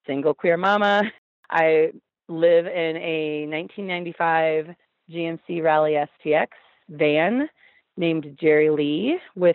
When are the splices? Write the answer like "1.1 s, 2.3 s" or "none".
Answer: 1.2 s